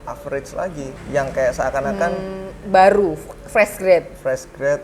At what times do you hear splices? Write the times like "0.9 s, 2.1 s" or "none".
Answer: 0.9 s